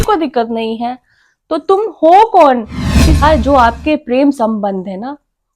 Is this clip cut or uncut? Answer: cut